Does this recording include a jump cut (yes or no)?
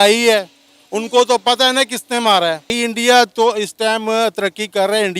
yes